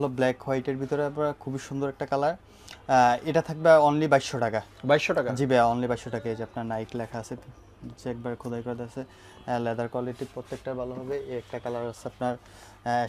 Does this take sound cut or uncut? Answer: uncut